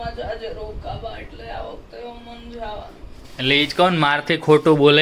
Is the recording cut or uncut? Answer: uncut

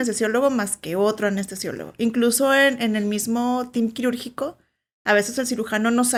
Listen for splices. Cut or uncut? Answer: uncut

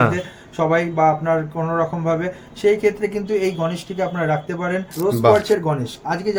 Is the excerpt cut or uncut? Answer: cut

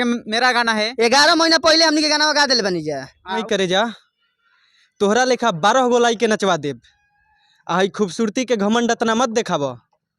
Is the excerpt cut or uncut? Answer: cut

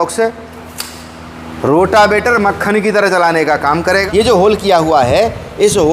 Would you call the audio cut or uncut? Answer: cut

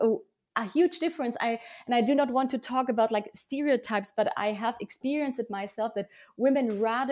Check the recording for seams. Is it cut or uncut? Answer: uncut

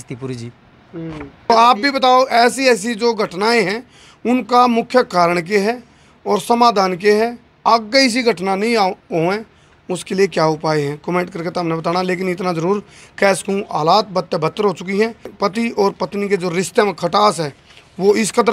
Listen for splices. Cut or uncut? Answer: uncut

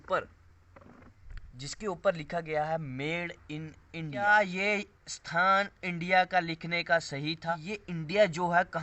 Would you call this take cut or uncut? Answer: cut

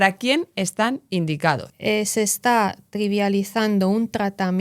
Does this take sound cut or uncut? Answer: cut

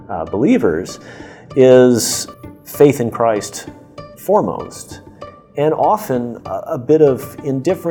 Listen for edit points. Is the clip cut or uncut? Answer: cut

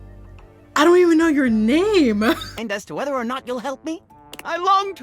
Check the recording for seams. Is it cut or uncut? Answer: cut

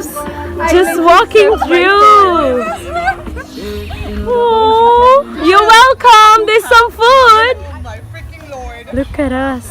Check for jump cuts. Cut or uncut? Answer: cut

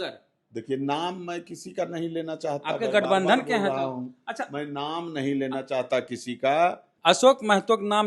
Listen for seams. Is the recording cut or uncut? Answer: cut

